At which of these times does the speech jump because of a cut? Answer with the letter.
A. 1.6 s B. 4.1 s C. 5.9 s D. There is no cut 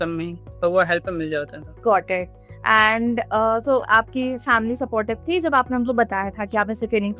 A